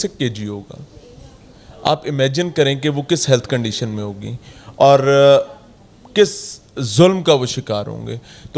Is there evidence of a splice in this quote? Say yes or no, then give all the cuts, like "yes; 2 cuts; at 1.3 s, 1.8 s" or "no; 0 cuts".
no; 0 cuts